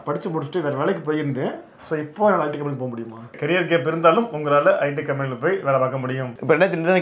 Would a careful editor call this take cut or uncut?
cut